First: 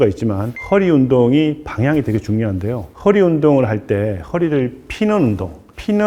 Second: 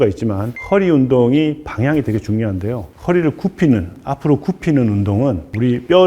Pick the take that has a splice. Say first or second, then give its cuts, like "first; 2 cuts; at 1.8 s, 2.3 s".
second; 1 cut; at 2.9 s